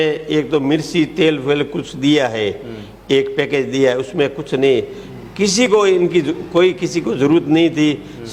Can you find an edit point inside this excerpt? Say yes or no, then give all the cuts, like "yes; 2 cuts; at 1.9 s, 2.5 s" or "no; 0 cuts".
no; 0 cuts